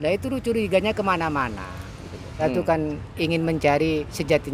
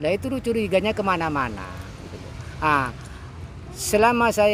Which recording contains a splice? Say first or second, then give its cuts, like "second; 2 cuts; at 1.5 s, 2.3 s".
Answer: first; 1 cut; at 2.4 s